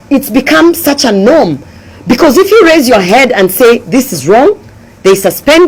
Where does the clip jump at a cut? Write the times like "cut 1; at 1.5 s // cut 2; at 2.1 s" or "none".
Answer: none